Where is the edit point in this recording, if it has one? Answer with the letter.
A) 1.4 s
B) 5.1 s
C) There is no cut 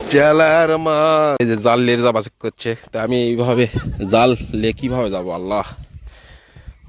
A